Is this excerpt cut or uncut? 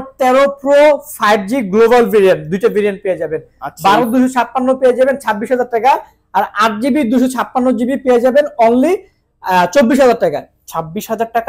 uncut